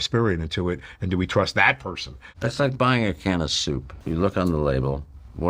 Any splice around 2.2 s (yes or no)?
yes